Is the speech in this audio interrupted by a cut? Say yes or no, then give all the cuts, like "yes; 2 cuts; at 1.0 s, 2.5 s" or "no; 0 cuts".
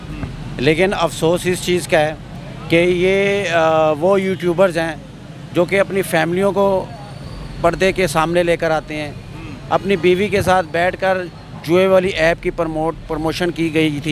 no; 0 cuts